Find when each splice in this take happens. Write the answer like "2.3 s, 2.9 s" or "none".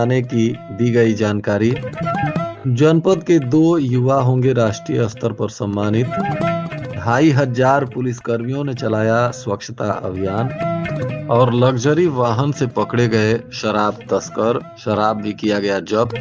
none